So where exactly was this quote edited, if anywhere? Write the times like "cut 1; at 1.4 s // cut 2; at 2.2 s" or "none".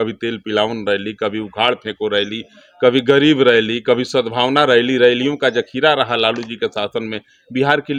none